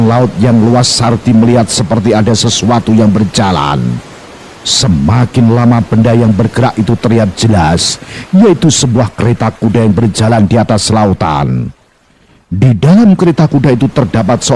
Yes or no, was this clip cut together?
no